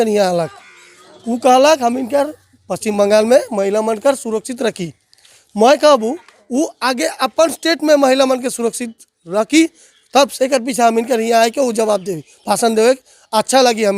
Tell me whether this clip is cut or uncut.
uncut